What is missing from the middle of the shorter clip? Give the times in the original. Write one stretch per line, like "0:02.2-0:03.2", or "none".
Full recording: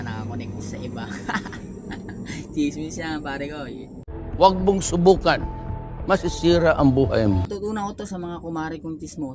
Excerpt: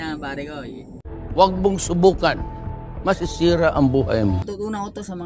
none